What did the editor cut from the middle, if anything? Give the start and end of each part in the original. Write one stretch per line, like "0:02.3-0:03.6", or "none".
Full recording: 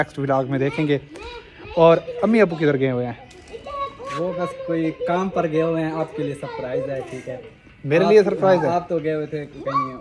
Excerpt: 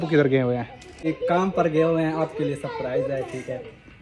0:03.5-0:04.8